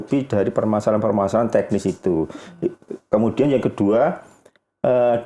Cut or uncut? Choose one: uncut